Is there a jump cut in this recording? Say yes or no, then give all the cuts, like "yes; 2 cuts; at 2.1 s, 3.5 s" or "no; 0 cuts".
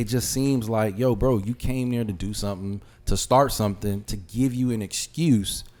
no; 0 cuts